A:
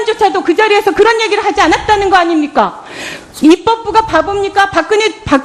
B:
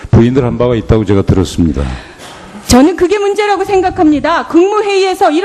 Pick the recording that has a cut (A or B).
A